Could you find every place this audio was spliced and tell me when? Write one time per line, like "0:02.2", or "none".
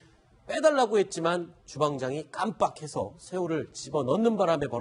0:03.5